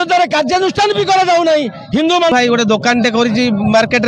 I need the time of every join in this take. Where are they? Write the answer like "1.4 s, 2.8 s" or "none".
2.3 s